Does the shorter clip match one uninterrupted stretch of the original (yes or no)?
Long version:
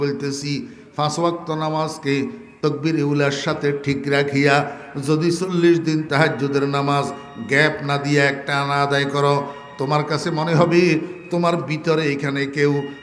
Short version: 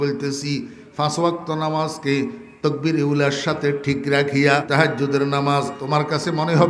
no